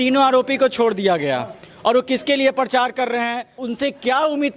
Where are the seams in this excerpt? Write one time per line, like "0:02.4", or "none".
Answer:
0:03.6